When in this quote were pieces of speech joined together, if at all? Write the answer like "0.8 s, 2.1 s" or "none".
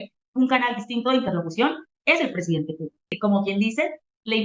3.2 s